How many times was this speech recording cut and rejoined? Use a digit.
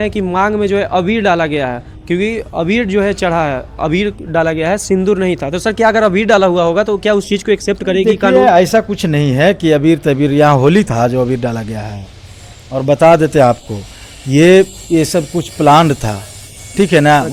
0